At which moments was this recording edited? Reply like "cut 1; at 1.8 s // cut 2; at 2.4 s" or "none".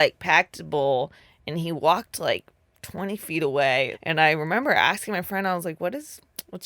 cut 1; at 4.0 s